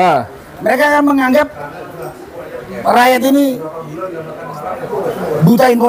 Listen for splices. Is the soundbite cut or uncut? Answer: uncut